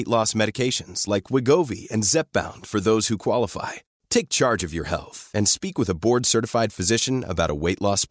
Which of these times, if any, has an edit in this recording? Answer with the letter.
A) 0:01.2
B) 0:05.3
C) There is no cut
C